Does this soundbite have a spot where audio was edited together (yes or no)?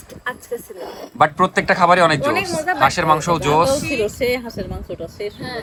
no